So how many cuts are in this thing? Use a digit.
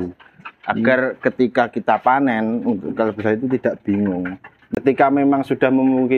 1